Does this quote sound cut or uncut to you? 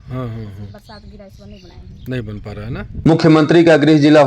cut